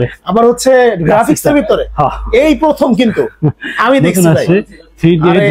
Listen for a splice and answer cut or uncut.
uncut